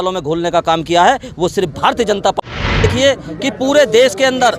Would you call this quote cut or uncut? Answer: cut